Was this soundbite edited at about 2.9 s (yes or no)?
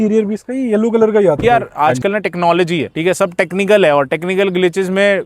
yes